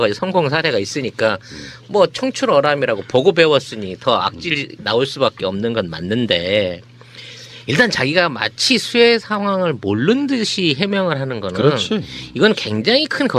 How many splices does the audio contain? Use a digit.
1